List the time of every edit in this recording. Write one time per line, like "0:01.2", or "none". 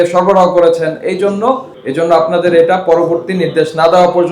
0:01.8

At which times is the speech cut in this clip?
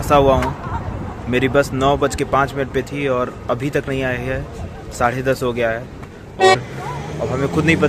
0:06.5

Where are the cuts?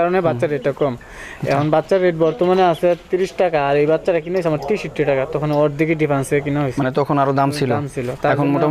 none

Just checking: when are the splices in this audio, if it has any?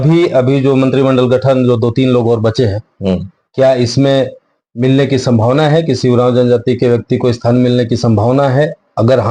none

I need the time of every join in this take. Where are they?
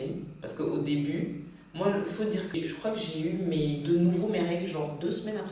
0:02.5

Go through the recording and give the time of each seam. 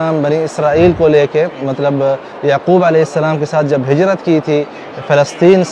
none

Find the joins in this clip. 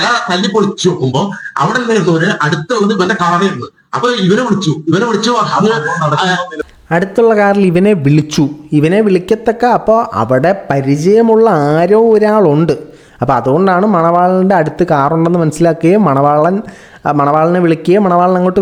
none

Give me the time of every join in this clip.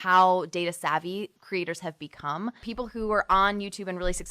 0:01.3
0:02.6

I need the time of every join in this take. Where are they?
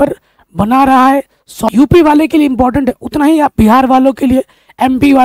0:01.5

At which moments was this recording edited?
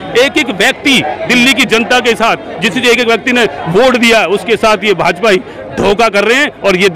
none

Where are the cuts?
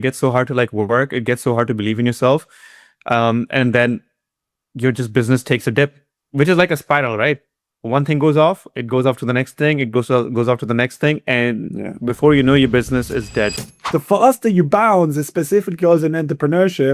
0:13.7

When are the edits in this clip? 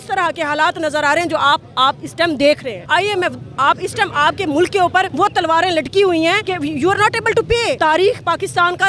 0:02.9
0:05.1
0:06.5
0:07.8

